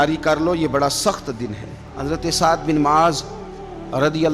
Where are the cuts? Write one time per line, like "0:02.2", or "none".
0:01.9